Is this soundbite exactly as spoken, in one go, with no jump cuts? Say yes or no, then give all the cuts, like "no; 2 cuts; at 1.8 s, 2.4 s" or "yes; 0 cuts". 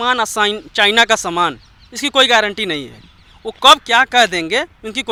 yes; 0 cuts